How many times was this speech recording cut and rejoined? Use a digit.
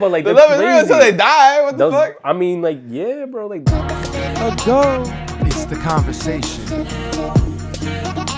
1